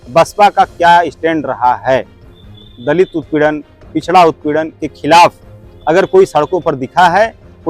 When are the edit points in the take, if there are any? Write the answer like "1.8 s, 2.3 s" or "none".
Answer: none